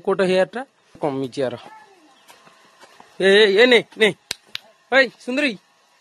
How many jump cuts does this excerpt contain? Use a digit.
1